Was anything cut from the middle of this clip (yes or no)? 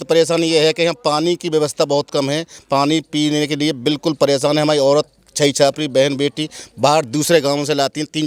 no